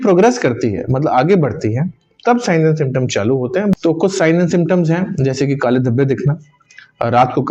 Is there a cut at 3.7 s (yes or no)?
yes